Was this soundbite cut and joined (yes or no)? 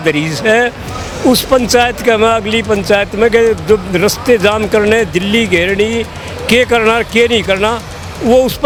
no